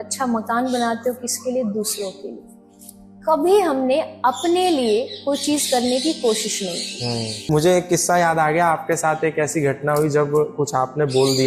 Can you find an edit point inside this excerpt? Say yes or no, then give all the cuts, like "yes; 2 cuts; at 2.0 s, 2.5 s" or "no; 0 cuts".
yes; 1 cut; at 7.3 s